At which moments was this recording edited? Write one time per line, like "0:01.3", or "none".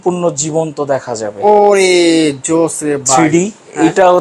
none